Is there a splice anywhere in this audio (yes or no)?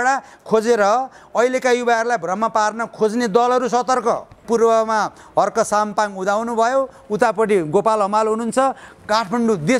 yes